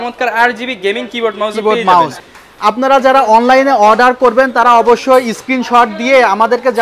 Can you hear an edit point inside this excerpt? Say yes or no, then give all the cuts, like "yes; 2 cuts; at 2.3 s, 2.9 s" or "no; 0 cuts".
no; 0 cuts